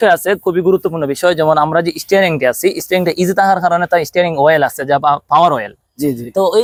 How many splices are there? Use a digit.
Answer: 0